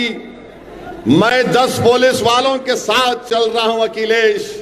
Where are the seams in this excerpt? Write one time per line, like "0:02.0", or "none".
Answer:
none